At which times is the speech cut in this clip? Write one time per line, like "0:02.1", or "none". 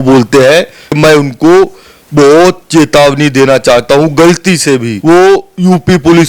0:01.0
0:04.9